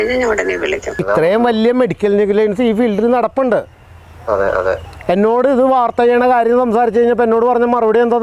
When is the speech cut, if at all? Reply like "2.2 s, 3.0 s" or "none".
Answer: 1.0 s

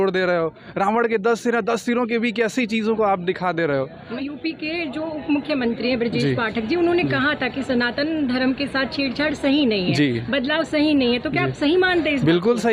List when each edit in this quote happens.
none

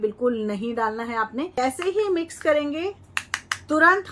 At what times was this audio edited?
1.6 s

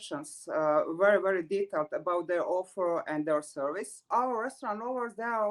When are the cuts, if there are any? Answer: 3.9 s

